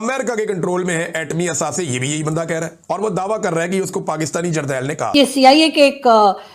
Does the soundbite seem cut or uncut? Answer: cut